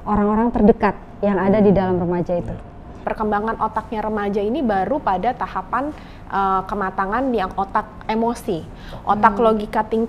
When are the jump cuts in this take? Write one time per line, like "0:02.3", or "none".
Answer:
0:02.9